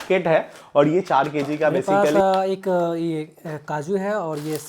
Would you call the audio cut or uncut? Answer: cut